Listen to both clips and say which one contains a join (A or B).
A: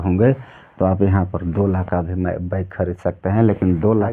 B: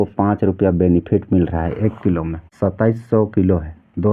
B